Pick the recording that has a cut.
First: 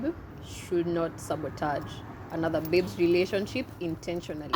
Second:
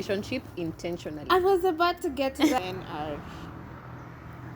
second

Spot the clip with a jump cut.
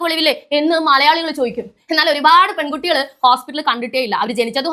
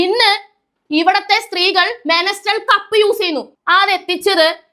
second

